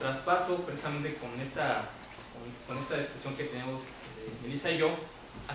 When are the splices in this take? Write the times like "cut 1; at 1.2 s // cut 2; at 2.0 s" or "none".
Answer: cut 1; at 3.0 s

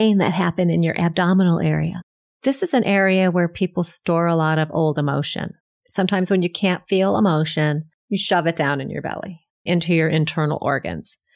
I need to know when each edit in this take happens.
cut 1; at 1.9 s // cut 2; at 5.6 s // cut 3; at 7.9 s // cut 4; at 9.6 s

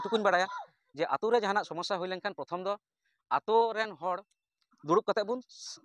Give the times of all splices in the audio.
none

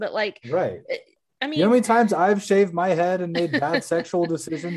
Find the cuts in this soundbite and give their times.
cut 1; at 1.2 s

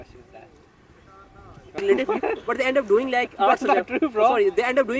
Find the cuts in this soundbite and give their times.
cut 1; at 1.8 s

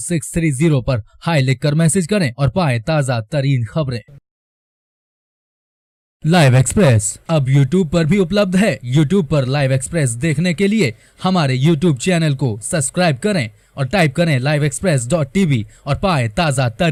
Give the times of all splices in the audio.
none

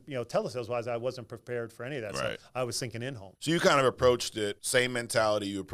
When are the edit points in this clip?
cut 1; at 3.3 s // cut 2; at 4.6 s

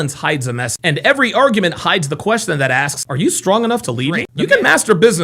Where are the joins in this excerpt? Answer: cut 1; at 4.3 s

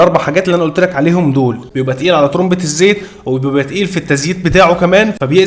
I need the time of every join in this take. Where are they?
cut 1; at 1.7 s

